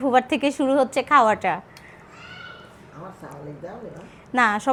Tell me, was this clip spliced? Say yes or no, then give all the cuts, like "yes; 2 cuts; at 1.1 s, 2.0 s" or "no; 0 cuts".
no; 0 cuts